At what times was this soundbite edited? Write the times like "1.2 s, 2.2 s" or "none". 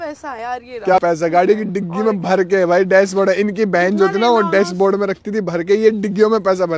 0.9 s

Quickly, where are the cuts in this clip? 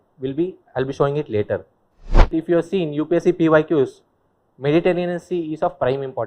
2.3 s

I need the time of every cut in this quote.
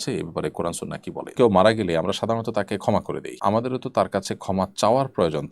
1.2 s, 3.2 s

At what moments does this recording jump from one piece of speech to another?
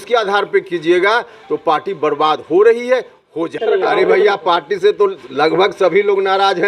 3.6 s

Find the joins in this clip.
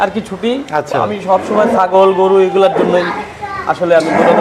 none

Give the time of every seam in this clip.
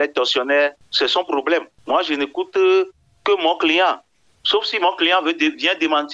0.8 s, 1.7 s

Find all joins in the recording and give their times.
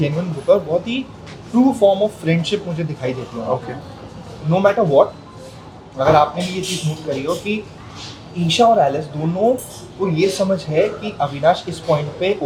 none

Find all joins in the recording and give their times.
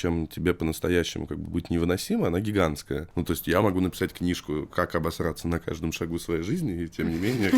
3.1 s

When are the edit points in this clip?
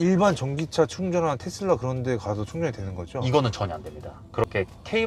none

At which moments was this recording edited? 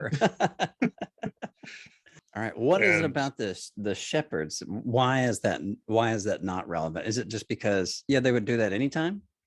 2.2 s

